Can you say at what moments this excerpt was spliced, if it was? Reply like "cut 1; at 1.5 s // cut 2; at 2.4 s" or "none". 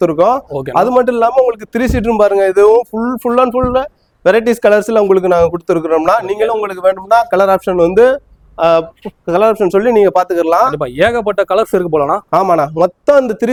none